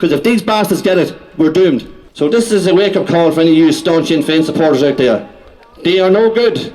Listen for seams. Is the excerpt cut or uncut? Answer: cut